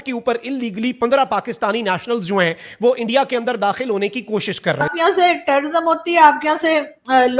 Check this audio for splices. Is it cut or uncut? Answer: cut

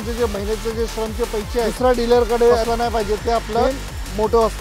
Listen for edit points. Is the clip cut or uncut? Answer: cut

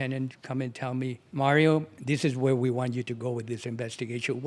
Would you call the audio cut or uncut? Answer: cut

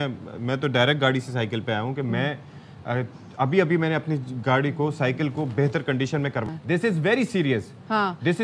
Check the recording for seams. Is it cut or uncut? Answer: cut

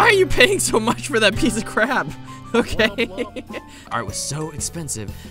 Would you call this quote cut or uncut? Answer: cut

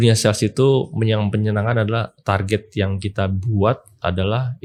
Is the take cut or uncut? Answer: uncut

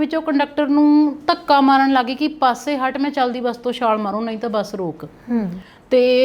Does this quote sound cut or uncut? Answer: uncut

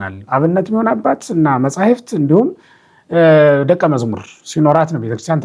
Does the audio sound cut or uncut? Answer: uncut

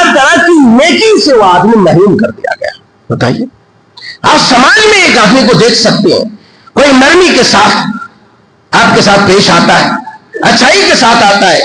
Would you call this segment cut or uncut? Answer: uncut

